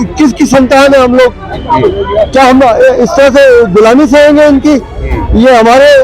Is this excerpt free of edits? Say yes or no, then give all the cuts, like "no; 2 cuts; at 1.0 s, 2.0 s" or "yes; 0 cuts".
yes; 0 cuts